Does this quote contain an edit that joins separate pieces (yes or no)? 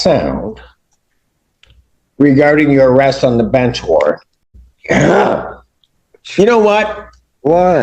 yes